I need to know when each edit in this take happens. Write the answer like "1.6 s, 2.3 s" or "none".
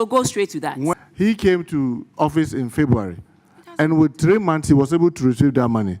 0.9 s